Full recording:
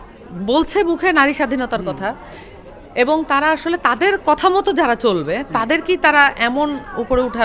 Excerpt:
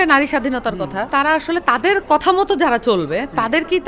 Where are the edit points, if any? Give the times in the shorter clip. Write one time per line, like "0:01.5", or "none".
0:01.1